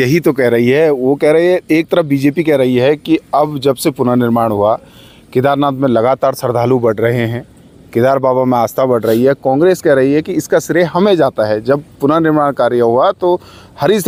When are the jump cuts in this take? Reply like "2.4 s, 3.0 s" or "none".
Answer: none